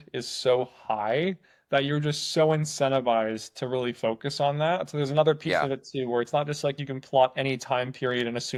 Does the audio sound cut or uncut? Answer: uncut